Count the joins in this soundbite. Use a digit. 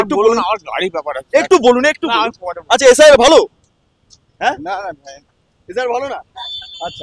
0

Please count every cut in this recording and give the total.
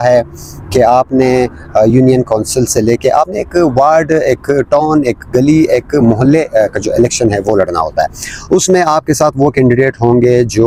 0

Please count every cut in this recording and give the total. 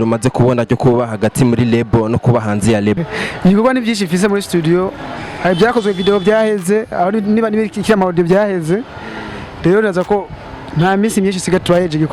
1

